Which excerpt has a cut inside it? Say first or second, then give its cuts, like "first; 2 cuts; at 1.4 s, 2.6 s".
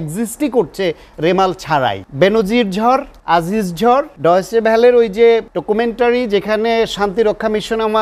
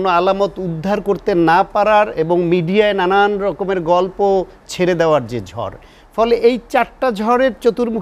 first; 4 cuts; at 2.0 s, 3.1 s, 4.1 s, 5.5 s